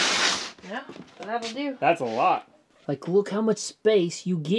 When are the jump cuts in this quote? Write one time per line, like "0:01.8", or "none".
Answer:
0:02.7

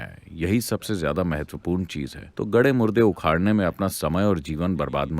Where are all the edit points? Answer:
0:02.2

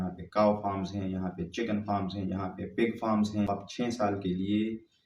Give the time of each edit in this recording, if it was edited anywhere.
0:03.7

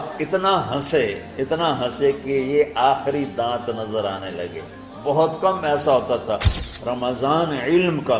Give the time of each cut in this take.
0:06.6

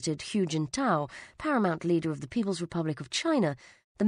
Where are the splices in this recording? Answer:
0:01.9

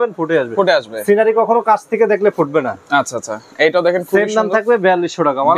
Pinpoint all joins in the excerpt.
none

